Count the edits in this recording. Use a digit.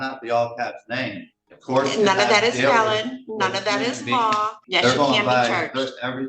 1